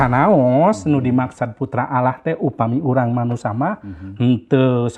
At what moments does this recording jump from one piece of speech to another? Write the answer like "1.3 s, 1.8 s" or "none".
none